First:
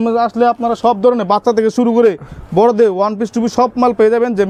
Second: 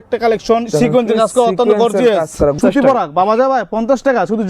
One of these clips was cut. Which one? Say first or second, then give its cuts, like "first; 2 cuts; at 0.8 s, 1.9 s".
second; 1 cut; at 2.6 s